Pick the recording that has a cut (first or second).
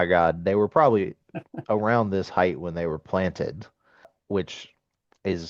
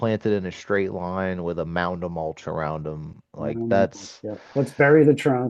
first